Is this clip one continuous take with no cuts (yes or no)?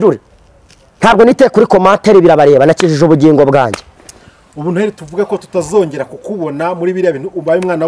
yes